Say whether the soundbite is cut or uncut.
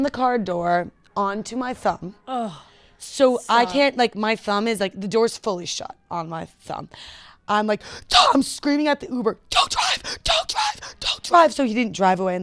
uncut